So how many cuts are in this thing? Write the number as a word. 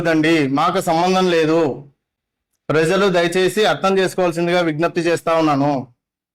zero